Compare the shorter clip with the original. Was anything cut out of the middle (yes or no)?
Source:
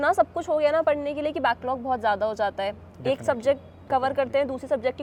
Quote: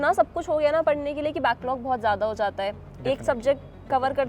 no